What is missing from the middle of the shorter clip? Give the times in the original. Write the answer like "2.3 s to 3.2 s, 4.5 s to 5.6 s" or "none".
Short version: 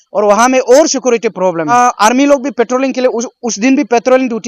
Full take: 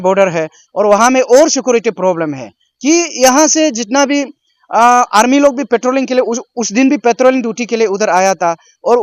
2.3 s to 4.8 s